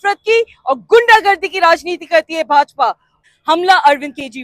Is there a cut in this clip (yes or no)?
yes